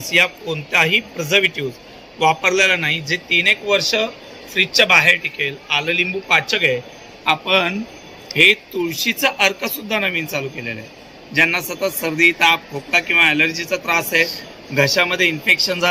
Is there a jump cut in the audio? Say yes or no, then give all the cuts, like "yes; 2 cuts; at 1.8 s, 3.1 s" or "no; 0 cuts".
no; 0 cuts